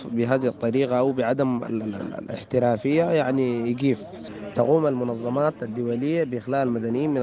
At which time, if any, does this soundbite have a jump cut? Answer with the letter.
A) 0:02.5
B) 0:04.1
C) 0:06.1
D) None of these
B